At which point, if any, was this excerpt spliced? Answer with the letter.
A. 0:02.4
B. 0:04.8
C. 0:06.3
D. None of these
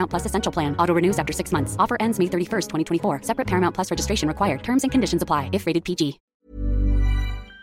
C